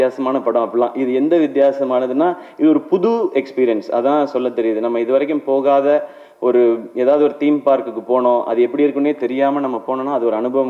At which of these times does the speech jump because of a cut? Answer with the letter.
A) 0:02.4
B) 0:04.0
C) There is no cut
C